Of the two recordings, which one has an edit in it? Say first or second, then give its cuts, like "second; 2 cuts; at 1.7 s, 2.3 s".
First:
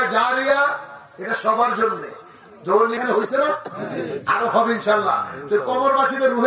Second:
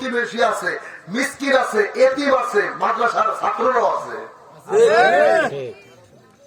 first; 1 cut; at 3.0 s